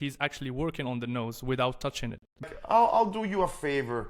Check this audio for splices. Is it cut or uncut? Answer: cut